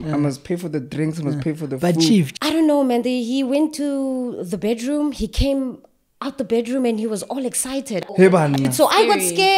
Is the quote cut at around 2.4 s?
yes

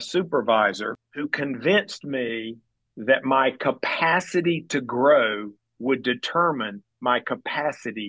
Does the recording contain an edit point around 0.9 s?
yes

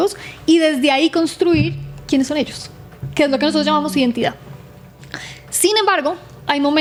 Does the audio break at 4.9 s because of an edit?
no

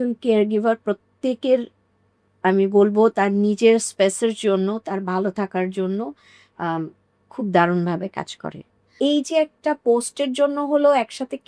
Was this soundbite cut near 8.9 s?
yes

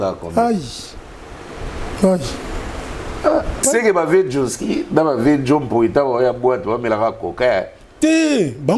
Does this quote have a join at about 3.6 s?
yes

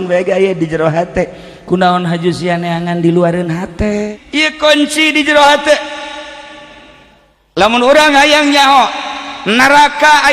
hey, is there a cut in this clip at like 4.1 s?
yes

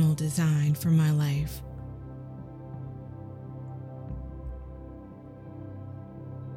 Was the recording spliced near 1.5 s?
no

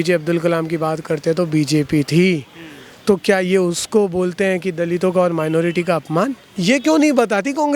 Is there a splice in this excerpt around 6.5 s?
yes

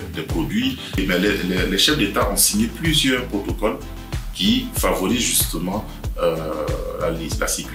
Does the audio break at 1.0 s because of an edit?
yes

